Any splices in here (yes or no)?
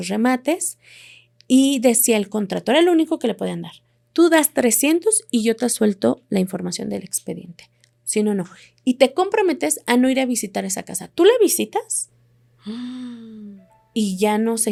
no